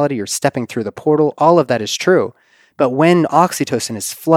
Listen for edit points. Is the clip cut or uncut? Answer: uncut